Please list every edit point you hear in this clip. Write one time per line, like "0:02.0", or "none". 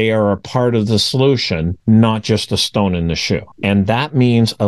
0:03.5